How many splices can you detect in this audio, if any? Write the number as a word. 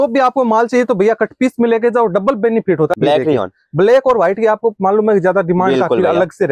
one